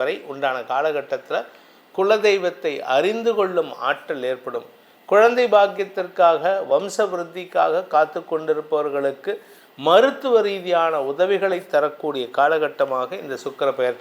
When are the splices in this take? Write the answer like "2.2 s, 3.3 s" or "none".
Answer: none